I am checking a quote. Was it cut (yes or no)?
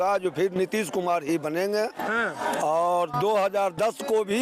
no